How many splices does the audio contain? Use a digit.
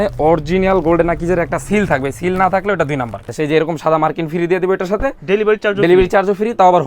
1